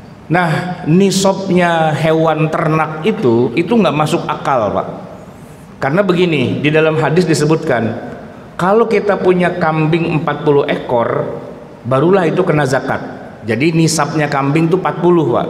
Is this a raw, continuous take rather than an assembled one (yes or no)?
yes